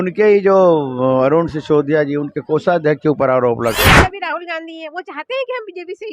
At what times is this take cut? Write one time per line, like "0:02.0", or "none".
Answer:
0:03.7